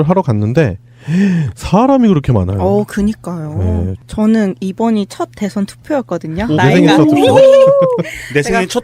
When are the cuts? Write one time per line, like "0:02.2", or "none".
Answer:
0:04.5